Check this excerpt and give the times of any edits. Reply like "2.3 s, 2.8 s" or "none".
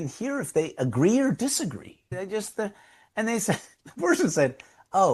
2.1 s